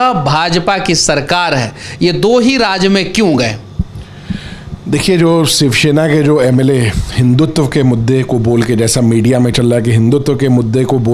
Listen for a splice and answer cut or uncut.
uncut